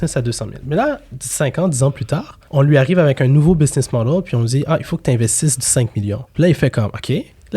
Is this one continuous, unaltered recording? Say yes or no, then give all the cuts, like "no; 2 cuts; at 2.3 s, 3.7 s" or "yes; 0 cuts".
no; 1 cut; at 6.3 s